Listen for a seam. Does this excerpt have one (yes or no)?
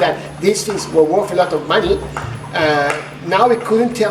no